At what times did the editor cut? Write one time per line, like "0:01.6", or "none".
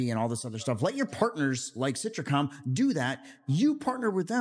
none